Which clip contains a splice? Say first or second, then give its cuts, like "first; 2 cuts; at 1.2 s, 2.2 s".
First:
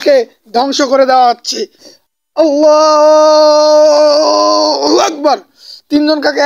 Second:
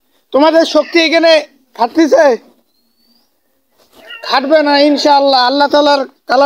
first; 1 cut; at 1.8 s